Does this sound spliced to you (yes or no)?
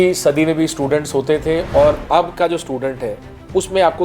yes